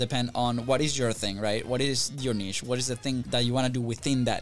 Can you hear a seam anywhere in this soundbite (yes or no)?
yes